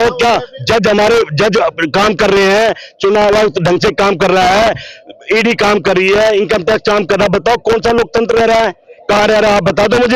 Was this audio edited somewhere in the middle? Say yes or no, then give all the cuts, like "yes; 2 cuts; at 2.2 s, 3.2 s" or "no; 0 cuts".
no; 0 cuts